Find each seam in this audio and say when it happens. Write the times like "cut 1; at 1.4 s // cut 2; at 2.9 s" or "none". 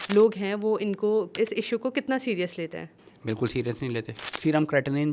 cut 1; at 1.3 s // cut 2; at 4.2 s